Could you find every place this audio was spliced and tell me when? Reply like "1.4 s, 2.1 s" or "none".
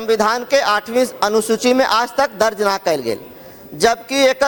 none